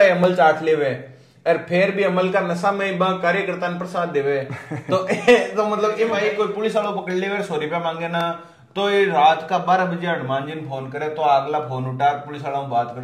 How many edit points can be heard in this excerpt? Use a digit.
1